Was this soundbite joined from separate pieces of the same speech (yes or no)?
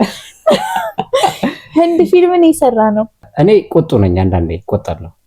yes